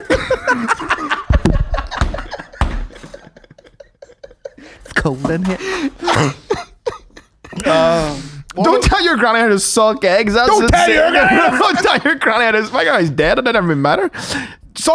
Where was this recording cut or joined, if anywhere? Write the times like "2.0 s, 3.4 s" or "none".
none

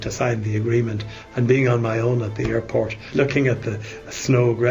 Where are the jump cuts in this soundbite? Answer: 3.0 s

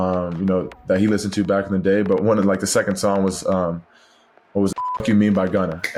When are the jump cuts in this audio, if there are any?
none

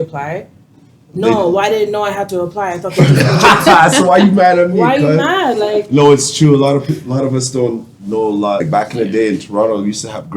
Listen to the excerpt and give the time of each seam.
8.6 s

